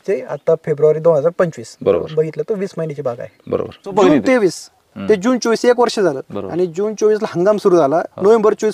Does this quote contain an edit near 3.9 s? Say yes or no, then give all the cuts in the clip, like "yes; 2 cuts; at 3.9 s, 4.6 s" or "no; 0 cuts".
yes; 1 cut; at 3.9 s